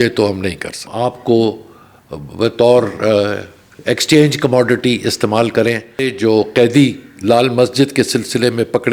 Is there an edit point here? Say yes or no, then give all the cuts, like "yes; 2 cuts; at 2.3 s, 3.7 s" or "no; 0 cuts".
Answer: yes; 2 cuts; at 0.9 s, 6.1 s